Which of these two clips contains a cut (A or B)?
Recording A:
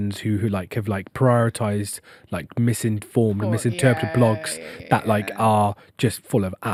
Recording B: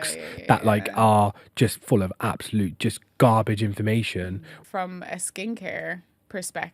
B